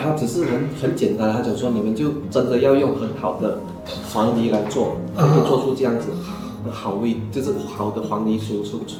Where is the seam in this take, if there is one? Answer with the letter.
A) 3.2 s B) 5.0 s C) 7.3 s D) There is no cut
D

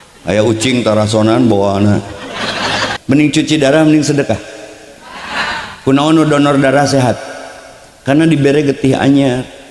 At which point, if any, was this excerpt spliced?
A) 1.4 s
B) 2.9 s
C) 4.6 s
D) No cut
B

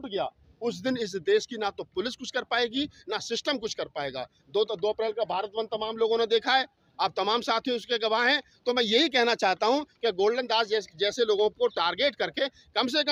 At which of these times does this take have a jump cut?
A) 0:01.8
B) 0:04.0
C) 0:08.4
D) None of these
D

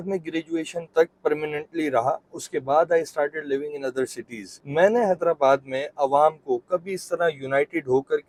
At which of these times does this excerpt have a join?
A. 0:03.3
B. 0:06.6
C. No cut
C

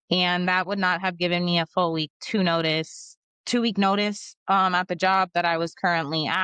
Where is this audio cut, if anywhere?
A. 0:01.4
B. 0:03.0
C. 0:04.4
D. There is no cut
D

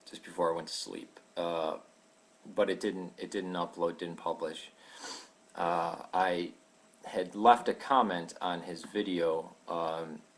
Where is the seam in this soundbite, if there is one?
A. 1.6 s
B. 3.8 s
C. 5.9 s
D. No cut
A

